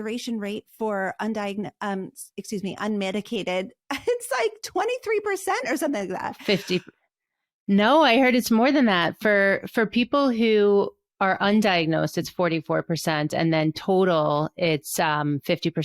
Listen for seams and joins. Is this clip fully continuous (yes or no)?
yes